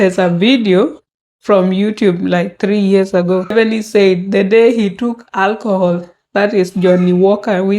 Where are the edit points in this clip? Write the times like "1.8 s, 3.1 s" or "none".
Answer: 3.5 s